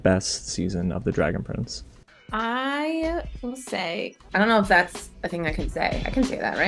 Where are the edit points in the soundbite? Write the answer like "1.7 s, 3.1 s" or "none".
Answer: 4.2 s